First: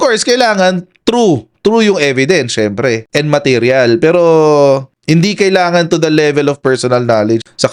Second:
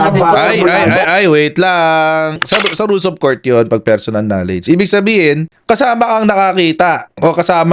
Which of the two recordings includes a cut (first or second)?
second